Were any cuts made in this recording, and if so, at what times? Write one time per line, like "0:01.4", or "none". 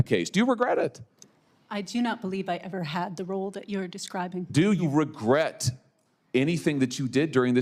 none